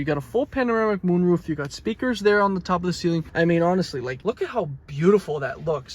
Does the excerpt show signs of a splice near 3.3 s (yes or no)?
yes